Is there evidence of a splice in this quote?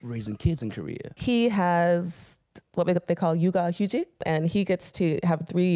yes; 2 cuts; at 1.1 s, 4.2 s

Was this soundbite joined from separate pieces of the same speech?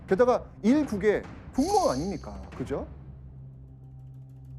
no; 0 cuts

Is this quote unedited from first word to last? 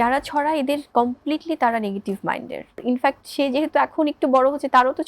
no; 1 cut; at 2.8 s

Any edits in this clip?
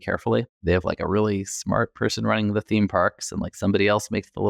no; 0 cuts

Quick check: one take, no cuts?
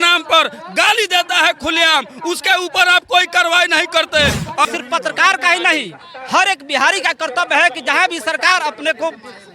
no; 1 cut; at 4.7 s

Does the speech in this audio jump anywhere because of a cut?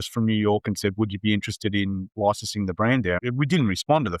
yes; 1 cut; at 3.2 s

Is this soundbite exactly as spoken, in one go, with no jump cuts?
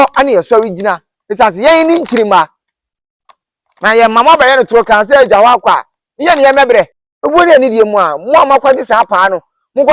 no; 1 cut; at 7.0 s

